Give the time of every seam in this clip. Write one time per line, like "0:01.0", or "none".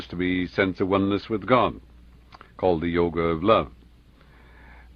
0:02.2